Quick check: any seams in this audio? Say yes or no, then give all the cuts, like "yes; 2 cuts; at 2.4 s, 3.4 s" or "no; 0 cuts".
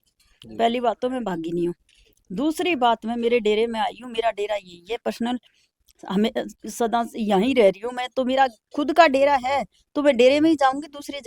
no; 0 cuts